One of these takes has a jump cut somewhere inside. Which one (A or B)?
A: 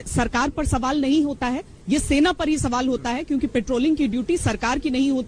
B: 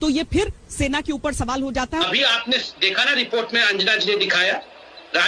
B